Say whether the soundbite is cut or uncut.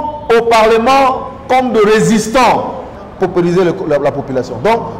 cut